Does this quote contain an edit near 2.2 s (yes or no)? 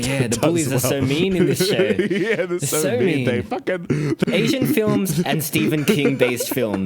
no